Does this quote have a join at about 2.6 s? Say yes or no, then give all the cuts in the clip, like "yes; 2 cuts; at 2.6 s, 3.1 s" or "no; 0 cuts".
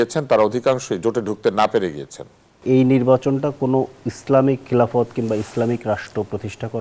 yes; 1 cut; at 2.6 s